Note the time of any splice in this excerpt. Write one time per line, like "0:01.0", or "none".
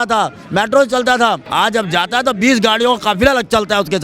0:01.4